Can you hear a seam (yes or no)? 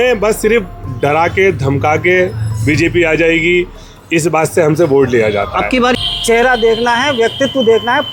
yes